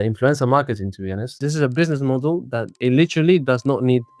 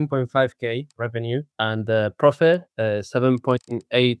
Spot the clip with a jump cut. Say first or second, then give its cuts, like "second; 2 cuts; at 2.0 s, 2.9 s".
first; 2 cuts; at 1.4 s, 2.7 s